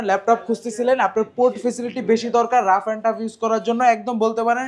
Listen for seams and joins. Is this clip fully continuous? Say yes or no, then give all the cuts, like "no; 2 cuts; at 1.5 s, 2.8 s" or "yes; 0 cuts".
yes; 0 cuts